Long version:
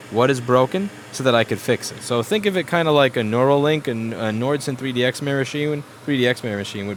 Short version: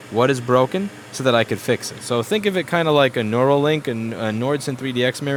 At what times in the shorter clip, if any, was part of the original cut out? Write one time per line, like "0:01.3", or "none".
none